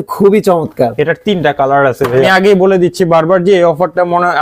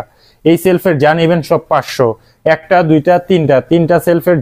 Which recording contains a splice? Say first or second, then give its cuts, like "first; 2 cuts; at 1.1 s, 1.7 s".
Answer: first; 1 cut; at 2.3 s